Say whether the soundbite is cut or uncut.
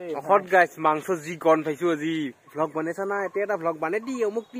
cut